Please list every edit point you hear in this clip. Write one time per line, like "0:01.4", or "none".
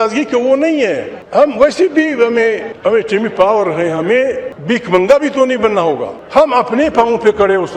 0:01.1
0:02.7
0:04.5
0:06.1